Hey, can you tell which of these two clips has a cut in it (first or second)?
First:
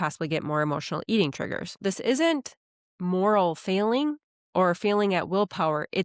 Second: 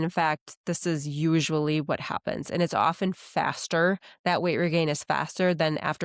first